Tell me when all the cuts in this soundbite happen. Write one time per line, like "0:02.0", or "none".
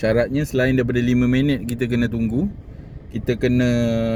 none